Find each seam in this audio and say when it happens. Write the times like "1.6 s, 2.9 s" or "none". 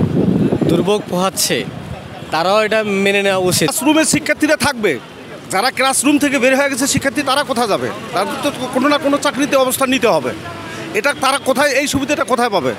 3.7 s